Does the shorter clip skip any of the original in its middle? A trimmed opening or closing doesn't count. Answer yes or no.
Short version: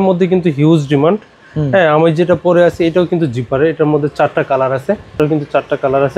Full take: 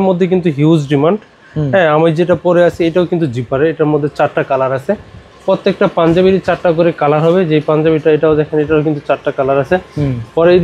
yes